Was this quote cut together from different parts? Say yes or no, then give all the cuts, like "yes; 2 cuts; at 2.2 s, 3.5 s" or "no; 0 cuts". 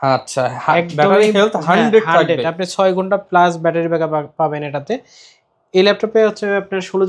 no; 0 cuts